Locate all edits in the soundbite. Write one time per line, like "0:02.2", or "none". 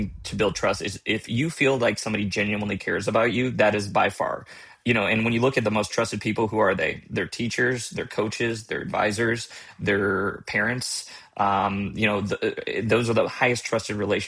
none